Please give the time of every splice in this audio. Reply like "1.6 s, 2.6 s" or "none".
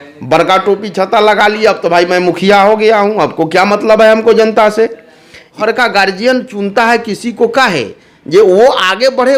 5.5 s